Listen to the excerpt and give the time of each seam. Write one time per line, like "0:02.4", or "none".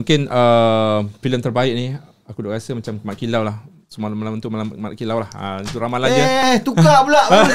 none